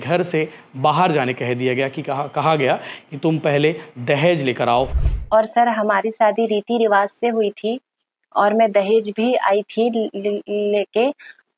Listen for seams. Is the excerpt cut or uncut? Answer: cut